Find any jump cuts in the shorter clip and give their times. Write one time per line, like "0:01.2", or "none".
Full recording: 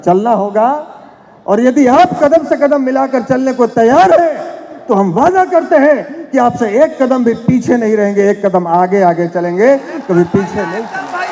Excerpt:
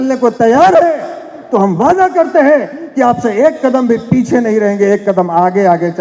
none

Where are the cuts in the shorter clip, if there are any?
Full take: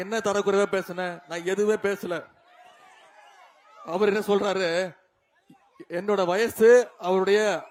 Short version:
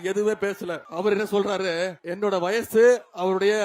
0:00.8
0:02.0

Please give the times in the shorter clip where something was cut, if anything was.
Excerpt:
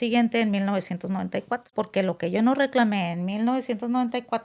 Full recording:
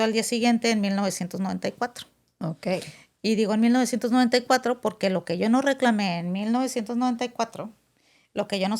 0:01.7

